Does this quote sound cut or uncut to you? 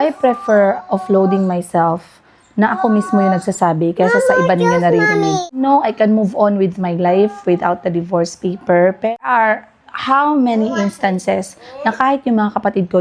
cut